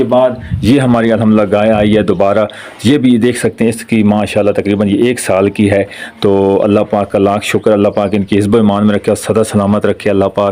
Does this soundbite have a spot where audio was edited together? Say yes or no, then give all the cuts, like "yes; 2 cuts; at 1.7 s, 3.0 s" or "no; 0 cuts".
no; 0 cuts